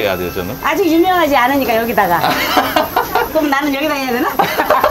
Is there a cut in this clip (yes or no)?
yes